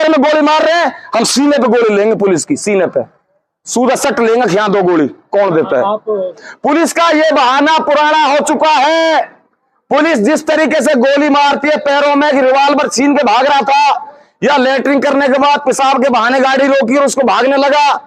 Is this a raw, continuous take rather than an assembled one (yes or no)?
no